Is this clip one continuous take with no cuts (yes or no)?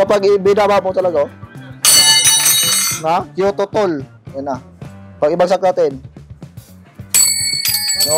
yes